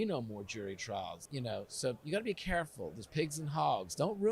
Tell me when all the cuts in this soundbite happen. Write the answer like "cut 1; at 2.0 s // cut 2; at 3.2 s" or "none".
cut 1; at 1.2 s